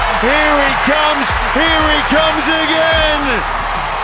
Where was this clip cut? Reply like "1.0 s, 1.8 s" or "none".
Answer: none